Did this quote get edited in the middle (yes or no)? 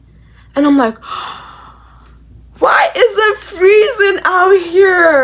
no